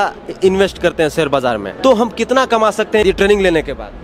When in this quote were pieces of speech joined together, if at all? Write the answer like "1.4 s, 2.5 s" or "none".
1.7 s, 3.0 s